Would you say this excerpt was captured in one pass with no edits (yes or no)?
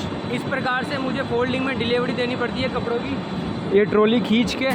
yes